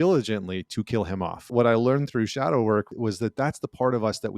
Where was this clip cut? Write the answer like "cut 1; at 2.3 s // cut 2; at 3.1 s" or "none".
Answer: cut 1; at 1.5 s // cut 2; at 2.9 s